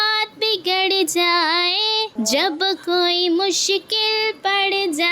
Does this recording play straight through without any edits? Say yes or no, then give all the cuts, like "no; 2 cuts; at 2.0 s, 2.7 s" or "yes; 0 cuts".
no; 1 cut; at 2.1 s